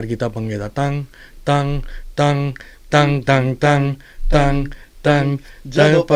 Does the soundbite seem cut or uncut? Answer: uncut